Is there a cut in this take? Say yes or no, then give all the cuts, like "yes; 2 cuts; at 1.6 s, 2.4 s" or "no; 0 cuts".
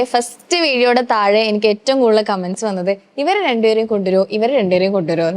no; 0 cuts